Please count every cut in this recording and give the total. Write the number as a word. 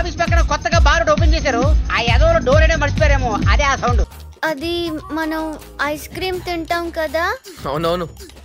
one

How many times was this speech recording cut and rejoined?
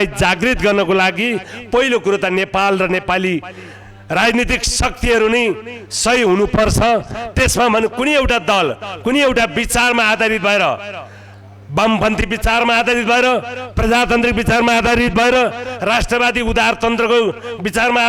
zero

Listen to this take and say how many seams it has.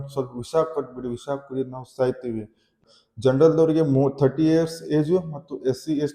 one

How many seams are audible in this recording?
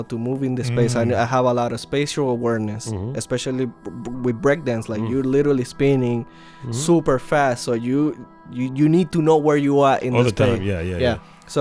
zero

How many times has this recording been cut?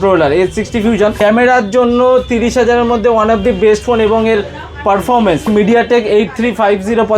two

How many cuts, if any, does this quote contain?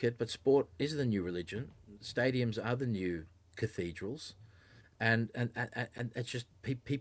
zero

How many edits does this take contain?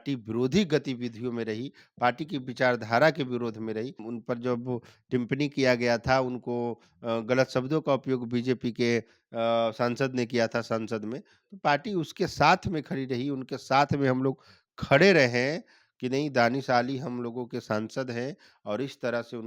one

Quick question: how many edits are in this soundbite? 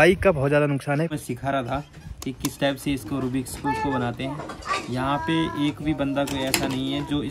one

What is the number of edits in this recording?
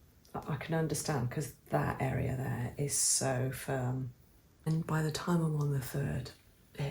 one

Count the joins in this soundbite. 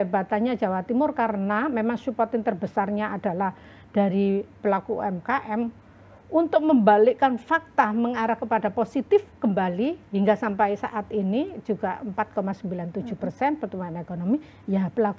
zero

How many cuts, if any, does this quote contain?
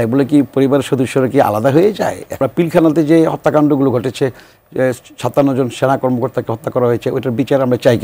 one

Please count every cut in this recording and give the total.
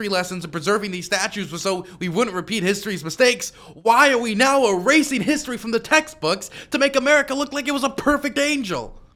zero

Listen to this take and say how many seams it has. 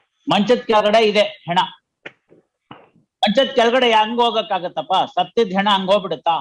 zero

